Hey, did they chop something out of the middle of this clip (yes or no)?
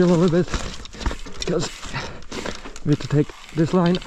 no